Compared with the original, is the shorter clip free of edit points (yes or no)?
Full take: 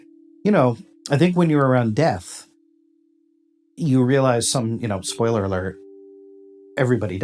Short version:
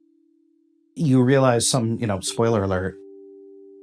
yes